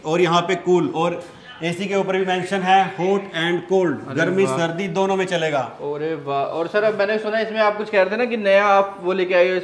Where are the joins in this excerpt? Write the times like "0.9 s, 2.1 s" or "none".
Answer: none